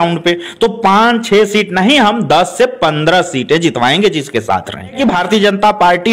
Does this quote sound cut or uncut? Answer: cut